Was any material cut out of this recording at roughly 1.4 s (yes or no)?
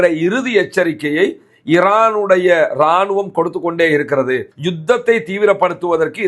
no